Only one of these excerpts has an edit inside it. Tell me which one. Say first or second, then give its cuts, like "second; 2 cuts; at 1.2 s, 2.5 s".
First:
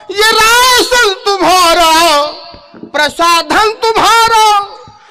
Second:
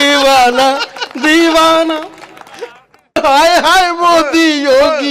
second; 1 cut; at 3.2 s